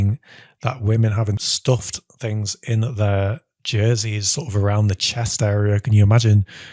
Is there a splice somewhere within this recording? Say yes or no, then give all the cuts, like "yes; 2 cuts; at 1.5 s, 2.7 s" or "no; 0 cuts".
yes; 1 cut; at 1.5 s